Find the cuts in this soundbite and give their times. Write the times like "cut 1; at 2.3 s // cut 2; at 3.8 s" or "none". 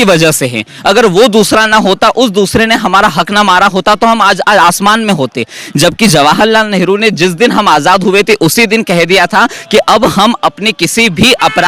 none